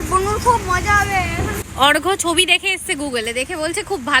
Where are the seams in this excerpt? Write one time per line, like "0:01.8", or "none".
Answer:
0:01.6